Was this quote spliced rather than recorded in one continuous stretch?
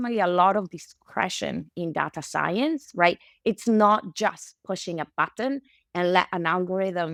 no; 0 cuts

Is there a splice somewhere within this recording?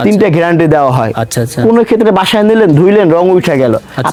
no; 0 cuts

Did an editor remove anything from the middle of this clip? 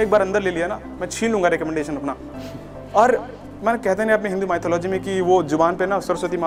no; 0 cuts

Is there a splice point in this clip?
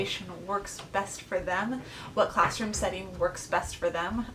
no; 0 cuts

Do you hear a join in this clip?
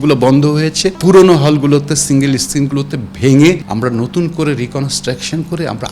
yes; 2 cuts; at 1.0 s, 3.6 s

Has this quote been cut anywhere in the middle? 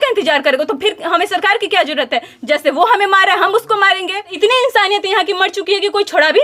yes; 1 cut; at 4.3 s

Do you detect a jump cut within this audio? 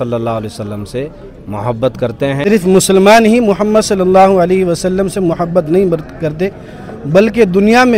yes; 1 cut; at 2.4 s

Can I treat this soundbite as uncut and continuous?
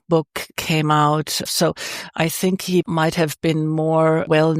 no; 2 cuts; at 1.5 s, 2.8 s

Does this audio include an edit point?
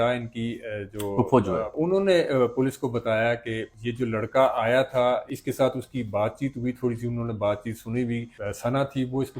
yes; 1 cut; at 1.7 s

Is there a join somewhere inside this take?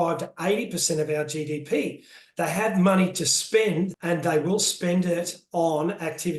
yes; 1 cut; at 4.0 s

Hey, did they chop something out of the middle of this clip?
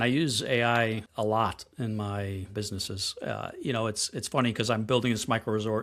yes; 2 cuts; at 1.1 s, 2.5 s

